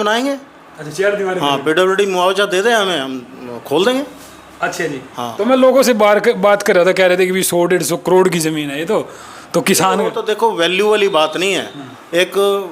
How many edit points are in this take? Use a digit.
0